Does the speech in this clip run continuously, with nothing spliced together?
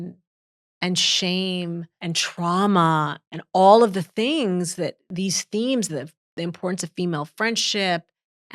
no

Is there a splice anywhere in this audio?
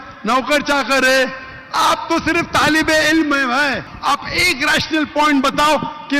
yes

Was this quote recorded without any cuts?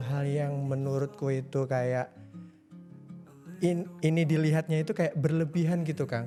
yes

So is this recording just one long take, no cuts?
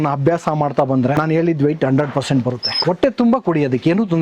no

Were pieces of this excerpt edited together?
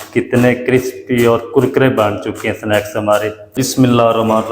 yes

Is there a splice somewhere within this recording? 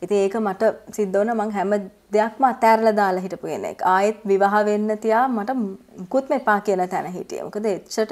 no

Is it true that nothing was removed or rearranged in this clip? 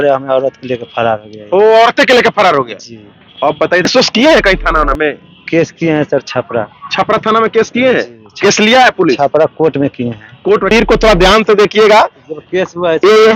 no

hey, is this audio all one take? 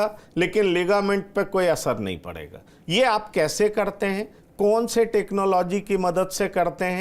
yes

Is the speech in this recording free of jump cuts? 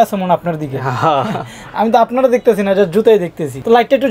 yes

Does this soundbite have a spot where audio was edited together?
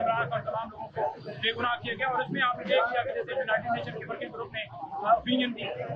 no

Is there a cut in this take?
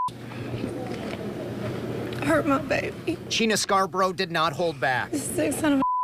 no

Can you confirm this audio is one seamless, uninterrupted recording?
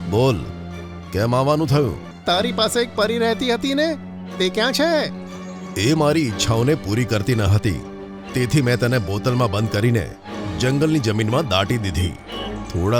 no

